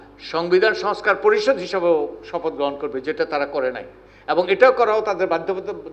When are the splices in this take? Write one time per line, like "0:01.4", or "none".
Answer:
none